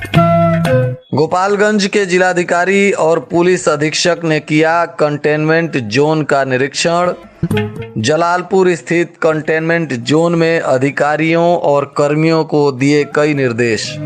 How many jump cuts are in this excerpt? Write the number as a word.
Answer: one